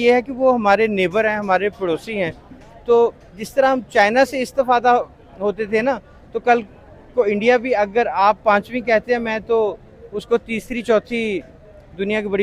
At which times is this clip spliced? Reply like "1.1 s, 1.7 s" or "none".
none